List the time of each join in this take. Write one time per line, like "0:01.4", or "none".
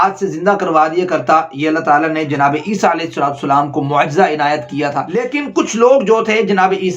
0:05.1